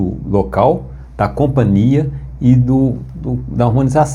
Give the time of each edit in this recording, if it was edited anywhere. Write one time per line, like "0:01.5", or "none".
none